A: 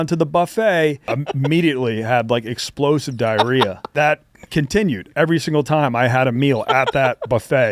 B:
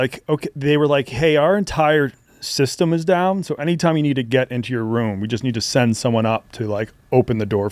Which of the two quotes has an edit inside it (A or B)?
A